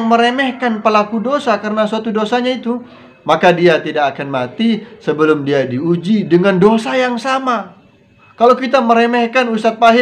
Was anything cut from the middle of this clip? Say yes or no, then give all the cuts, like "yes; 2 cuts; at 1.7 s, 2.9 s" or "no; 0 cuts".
no; 0 cuts